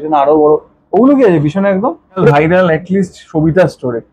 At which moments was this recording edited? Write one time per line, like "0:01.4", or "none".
0:02.3